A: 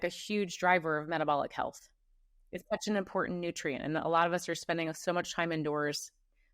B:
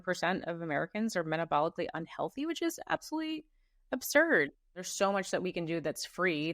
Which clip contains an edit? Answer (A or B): B